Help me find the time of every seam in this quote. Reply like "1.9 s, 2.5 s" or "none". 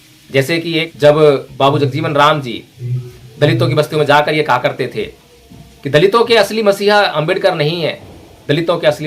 0.9 s